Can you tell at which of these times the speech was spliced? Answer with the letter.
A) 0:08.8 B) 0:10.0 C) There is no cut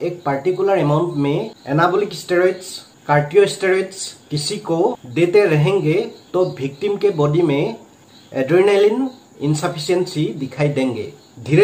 C